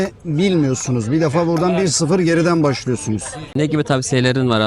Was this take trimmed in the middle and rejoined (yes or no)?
yes